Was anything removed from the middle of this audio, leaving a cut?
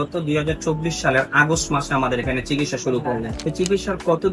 yes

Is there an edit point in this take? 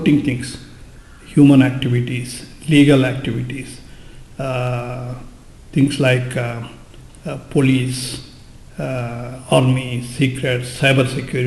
no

